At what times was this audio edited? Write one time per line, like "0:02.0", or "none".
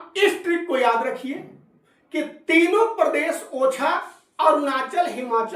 none